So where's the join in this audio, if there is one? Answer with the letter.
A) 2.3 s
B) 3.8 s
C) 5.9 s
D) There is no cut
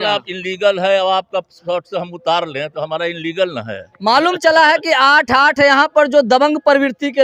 D